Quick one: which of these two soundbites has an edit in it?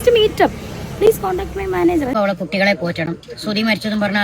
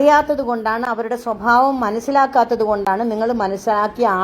first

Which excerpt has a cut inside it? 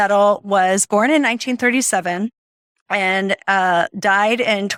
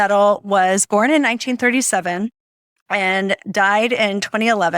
second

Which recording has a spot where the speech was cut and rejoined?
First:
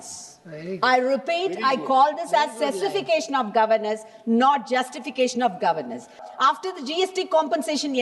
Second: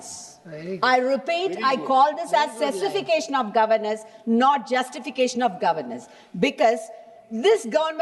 first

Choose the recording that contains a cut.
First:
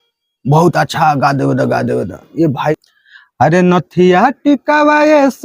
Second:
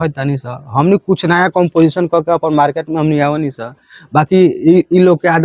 first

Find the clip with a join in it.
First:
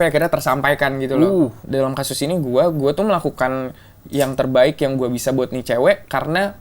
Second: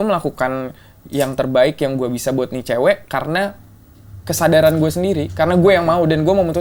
first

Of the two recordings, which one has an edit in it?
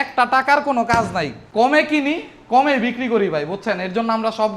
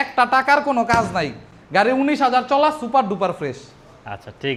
first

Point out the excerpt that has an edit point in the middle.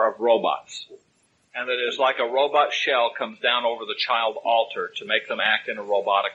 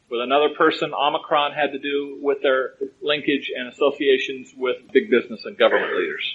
second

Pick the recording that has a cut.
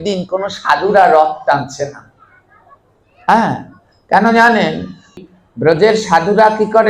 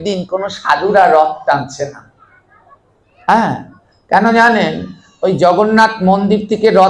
first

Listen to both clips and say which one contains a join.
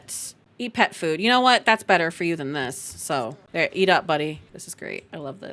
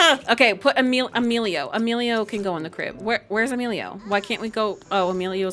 first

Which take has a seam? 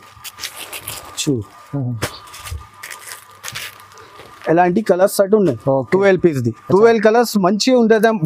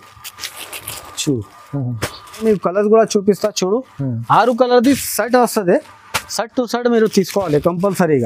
second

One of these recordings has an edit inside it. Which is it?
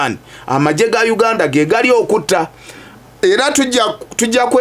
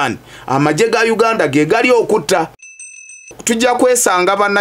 second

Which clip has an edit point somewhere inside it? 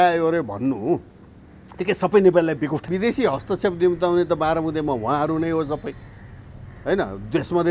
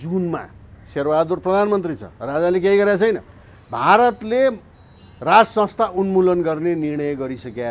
first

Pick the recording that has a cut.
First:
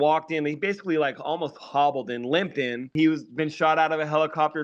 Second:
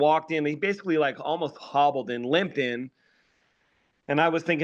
first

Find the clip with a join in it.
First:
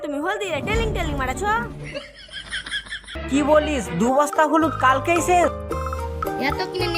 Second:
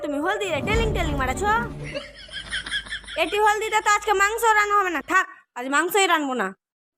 first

